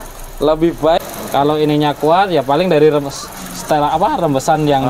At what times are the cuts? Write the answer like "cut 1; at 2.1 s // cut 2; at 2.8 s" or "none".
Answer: cut 1; at 1.0 s